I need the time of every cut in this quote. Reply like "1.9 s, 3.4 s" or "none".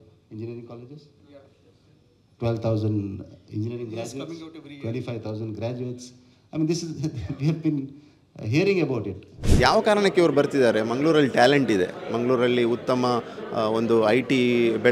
9.4 s

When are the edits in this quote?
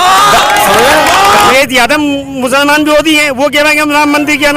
1.5 s

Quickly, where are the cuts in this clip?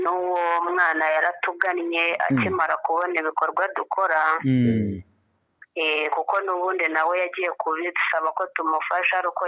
none

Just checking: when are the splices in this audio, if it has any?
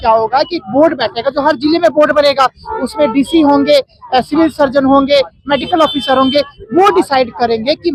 none

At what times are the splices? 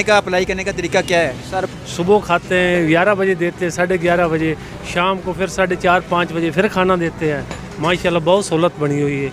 1.7 s

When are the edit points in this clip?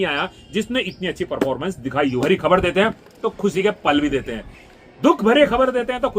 2.2 s

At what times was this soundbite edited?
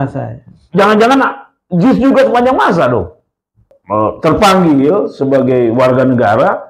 3.7 s

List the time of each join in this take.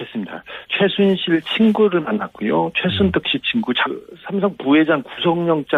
none

